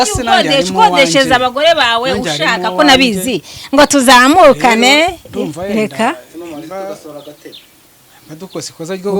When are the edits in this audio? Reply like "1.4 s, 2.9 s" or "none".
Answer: none

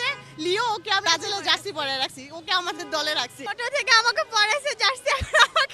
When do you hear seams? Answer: 1.0 s, 3.4 s

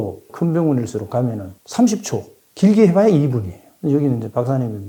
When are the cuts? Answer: none

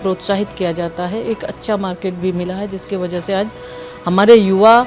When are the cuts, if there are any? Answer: none

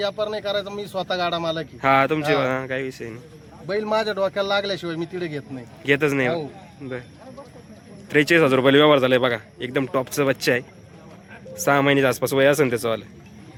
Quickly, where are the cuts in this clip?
none

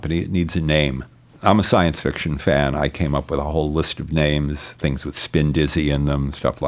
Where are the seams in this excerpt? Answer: 1.2 s

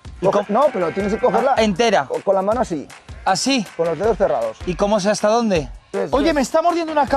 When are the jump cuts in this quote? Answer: 5.8 s

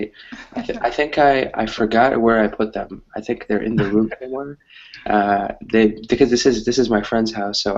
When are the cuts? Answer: 2.8 s

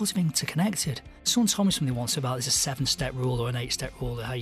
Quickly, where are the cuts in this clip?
1.2 s

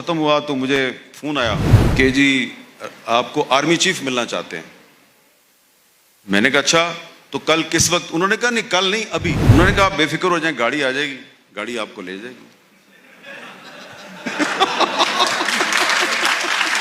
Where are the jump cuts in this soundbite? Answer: 1.8 s, 9.7 s

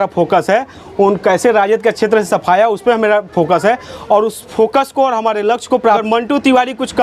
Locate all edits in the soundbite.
6.0 s

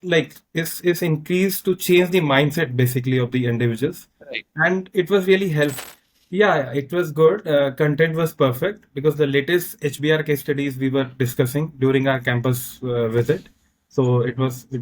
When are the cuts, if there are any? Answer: 5.7 s

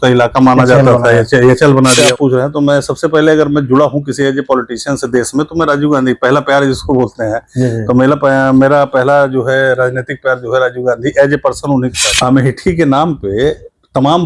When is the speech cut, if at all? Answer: 1.9 s, 12.0 s

